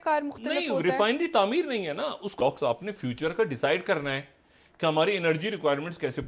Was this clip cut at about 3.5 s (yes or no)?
no